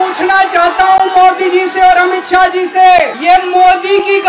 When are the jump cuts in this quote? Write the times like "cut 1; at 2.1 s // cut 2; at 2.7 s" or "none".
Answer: cut 1; at 3.1 s